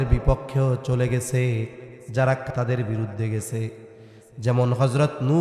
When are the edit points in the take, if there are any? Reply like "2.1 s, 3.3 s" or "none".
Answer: 2.5 s